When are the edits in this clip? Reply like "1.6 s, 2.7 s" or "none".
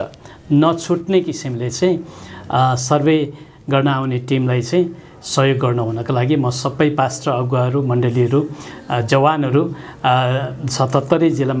none